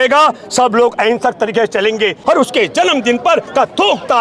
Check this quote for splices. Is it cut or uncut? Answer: cut